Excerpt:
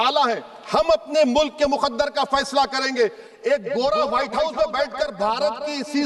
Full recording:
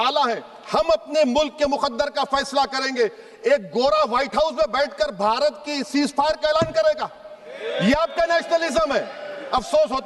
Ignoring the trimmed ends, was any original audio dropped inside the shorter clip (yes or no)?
no